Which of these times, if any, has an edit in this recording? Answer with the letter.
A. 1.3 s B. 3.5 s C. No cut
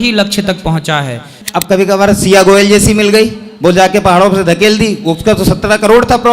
A